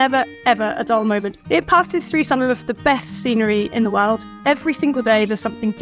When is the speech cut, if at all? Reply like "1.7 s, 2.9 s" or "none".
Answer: 1.3 s, 4.3 s